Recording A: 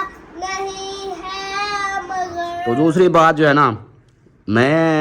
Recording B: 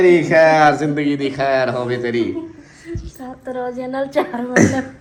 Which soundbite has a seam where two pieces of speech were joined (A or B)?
A